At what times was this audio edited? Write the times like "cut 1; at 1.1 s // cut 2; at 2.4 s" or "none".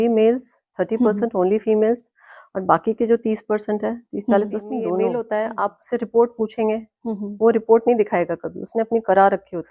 cut 1; at 5.2 s